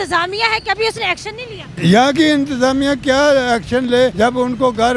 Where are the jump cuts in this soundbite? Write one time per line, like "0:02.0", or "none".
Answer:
0:01.7
0:04.1